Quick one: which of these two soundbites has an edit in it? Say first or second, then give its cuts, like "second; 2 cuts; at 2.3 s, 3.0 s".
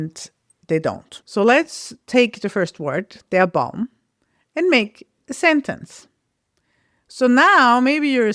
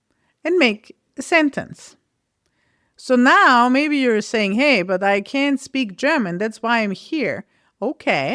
first; 1 cut; at 1.1 s